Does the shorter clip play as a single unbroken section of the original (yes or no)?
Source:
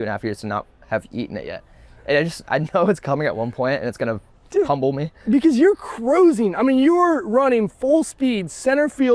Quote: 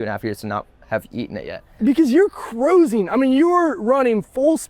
no